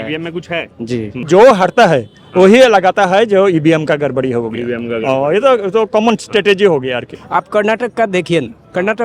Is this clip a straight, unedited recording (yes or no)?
no